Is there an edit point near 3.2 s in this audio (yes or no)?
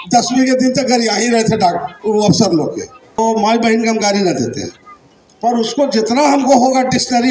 yes